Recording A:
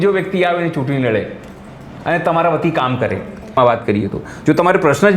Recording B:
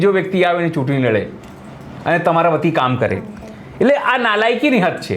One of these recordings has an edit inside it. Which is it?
A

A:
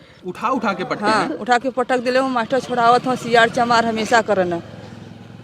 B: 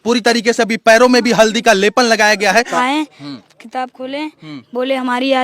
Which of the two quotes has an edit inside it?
B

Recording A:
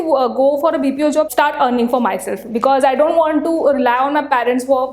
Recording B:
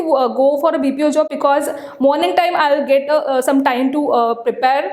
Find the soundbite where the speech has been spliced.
A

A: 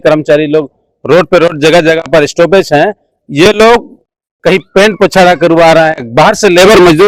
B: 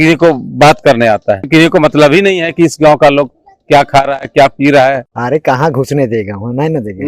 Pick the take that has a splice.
B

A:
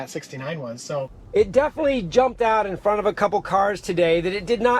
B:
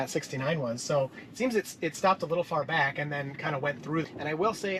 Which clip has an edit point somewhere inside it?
A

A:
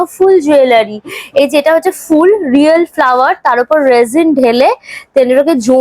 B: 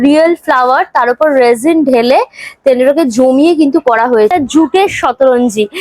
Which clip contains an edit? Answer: B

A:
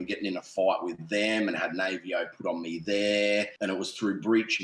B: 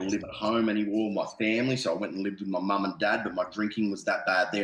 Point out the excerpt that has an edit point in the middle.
A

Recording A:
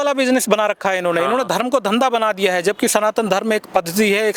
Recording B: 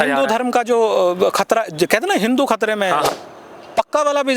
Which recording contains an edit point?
B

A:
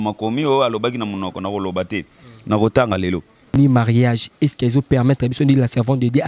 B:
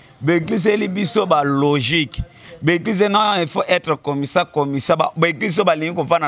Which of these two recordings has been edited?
A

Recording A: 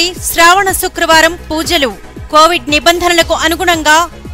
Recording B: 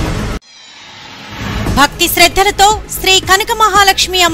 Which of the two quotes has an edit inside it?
B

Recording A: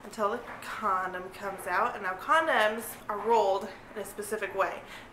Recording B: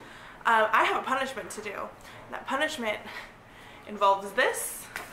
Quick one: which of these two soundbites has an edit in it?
A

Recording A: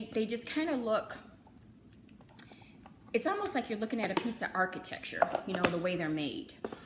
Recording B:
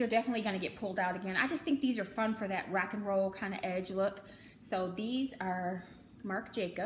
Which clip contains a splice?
B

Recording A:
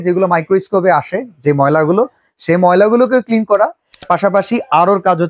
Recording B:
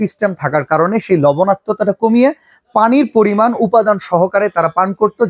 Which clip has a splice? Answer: A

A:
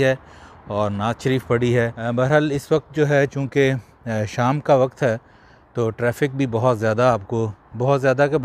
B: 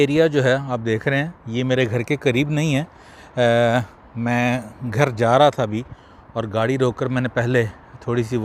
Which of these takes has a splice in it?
A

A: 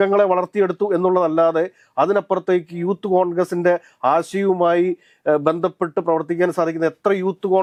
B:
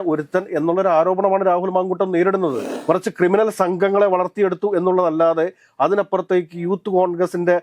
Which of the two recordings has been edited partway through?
B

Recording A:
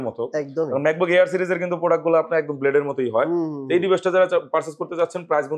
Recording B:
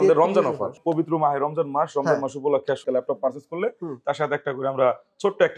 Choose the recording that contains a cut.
B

